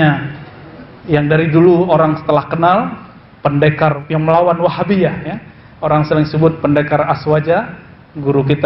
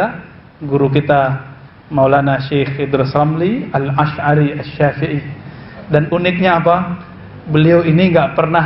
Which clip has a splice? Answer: first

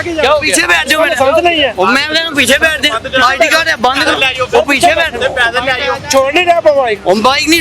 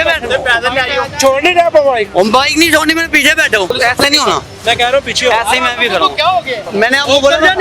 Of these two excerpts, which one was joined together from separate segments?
second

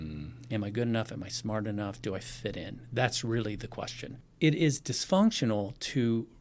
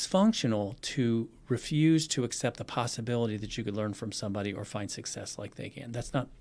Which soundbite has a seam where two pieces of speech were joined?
first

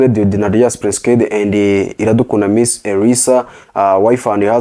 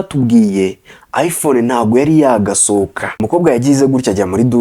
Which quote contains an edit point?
second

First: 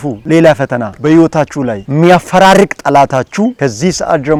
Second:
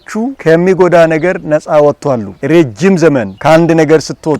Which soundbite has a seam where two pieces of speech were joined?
second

